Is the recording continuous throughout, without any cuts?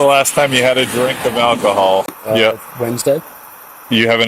no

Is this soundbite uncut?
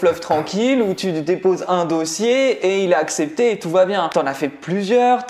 no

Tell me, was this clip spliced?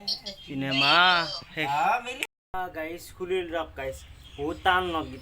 yes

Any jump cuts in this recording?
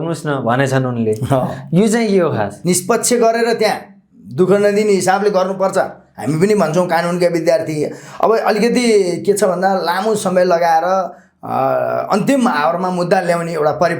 yes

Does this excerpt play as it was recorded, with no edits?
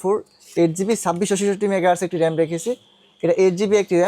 yes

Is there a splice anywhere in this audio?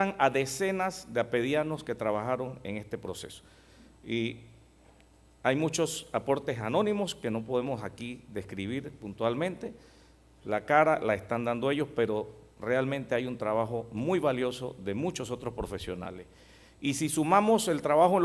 yes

